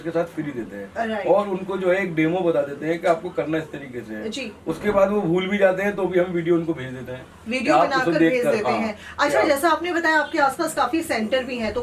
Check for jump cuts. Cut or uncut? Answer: uncut